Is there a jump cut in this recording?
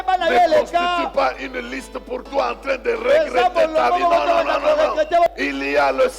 yes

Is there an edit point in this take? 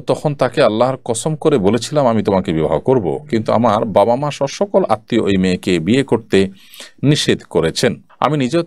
no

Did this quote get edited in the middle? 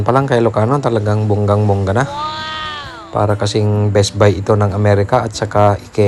no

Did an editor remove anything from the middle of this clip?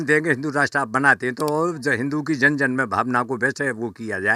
no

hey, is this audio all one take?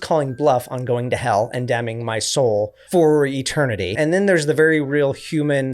no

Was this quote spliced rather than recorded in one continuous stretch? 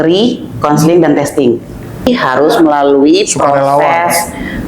yes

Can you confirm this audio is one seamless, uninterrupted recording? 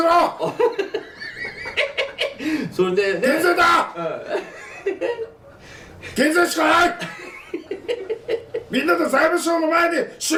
yes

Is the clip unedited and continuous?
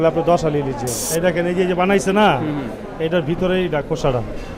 no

